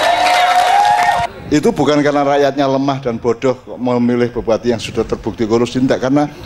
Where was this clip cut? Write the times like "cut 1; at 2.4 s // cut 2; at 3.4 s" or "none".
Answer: cut 1; at 1.3 s